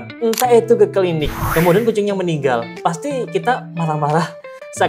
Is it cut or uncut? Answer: cut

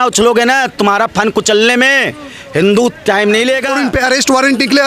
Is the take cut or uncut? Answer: cut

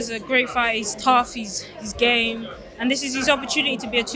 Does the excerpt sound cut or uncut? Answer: uncut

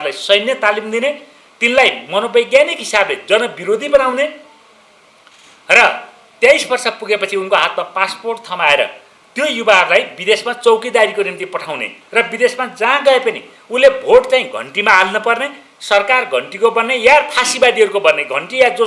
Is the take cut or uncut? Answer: uncut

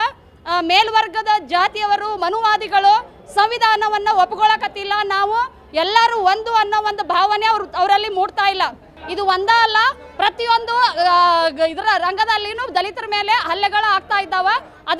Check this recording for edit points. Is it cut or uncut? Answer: uncut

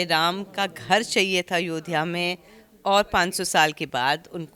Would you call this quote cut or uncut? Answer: uncut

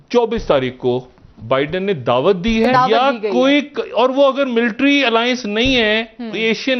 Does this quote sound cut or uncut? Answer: uncut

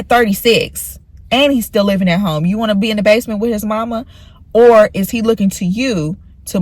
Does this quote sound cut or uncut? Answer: uncut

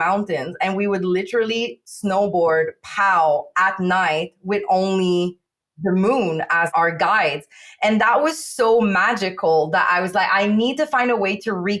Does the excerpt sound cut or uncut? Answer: uncut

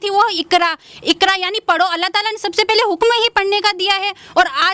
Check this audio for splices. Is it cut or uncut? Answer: uncut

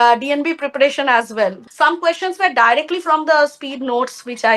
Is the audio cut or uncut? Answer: cut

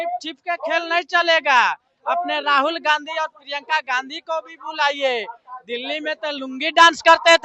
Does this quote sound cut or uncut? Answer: uncut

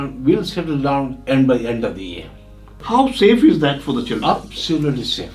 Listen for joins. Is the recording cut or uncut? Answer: cut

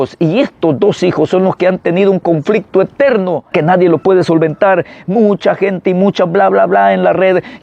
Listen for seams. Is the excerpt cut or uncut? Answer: cut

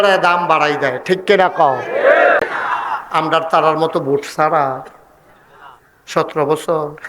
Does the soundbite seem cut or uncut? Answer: cut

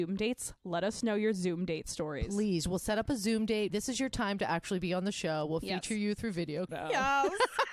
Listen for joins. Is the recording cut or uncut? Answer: cut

